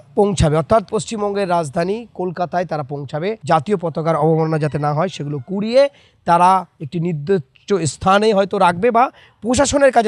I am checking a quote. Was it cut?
no; 0 cuts

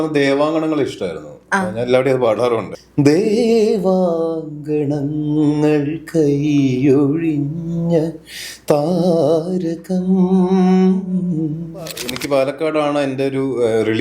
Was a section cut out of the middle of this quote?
yes; 1 cut; at 12.1 s

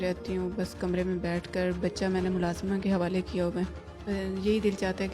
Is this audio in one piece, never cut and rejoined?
no; 1 cut; at 3.9 s

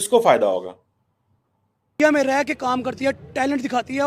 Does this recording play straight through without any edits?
no; 1 cut; at 2.0 s

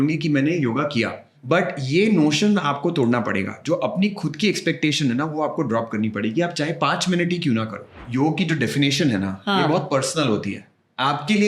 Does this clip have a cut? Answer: yes; 2 cuts; at 1.3 s, 8.0 s

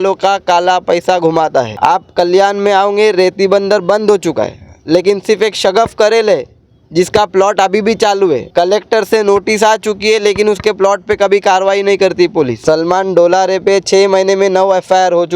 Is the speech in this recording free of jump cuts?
no; 3 cuts; at 1.7 s, 8.5 s, 12.6 s

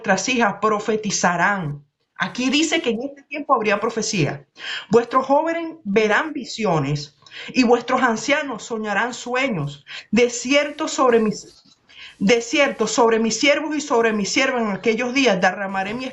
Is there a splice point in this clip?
no; 0 cuts

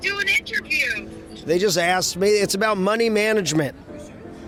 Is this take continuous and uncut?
yes; 0 cuts

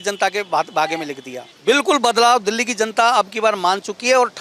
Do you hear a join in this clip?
yes; 1 cut; at 1.4 s

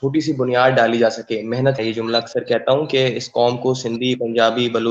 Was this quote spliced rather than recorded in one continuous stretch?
yes; 1 cut; at 1.8 s

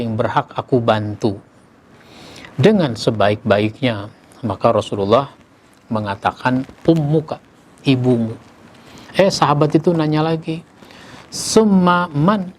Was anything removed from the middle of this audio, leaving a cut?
no; 0 cuts

